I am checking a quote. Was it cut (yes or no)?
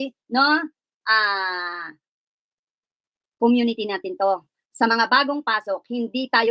no